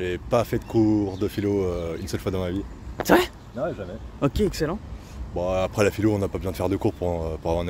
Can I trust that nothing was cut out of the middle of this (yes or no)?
yes